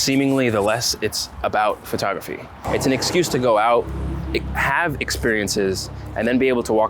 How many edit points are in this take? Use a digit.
1